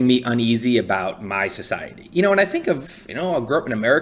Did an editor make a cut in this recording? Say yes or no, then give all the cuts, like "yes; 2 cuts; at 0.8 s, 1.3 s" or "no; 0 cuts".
no; 0 cuts